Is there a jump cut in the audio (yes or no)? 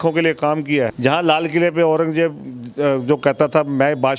yes